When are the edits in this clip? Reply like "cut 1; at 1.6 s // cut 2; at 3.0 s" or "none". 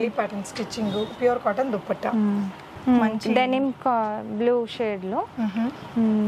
cut 1; at 2.6 s